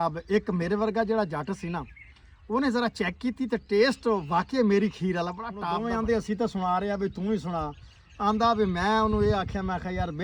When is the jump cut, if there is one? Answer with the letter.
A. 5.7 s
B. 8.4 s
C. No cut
A